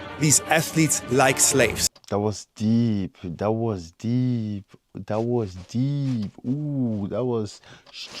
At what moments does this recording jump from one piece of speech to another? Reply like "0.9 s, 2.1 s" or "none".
1.9 s